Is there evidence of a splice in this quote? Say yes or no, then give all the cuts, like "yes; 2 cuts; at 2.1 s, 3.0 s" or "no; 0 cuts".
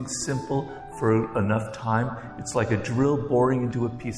no; 0 cuts